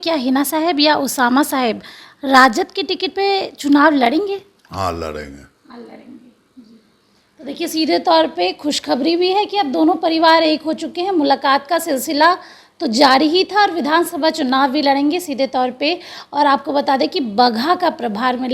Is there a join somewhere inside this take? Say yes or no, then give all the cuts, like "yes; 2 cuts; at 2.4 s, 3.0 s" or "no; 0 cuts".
no; 0 cuts